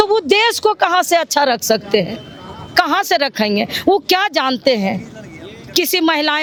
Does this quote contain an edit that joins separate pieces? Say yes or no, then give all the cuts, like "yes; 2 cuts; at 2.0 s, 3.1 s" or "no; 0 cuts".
no; 0 cuts